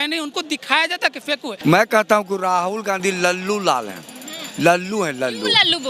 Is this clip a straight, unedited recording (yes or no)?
no